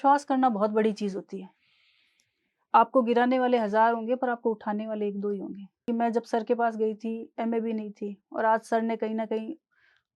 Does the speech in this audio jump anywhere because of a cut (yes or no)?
yes